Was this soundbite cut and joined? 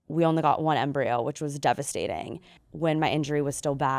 yes; 1 cut; at 2.5 s

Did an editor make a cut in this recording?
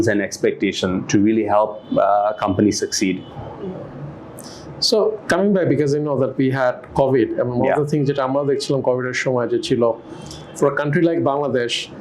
no; 0 cuts

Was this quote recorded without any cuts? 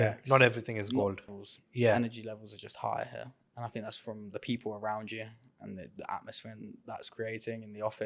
no; 1 cut; at 1.4 s

